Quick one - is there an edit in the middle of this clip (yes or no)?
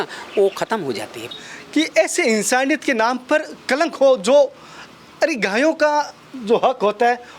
yes